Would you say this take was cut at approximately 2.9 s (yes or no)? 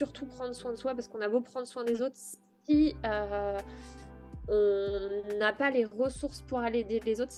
no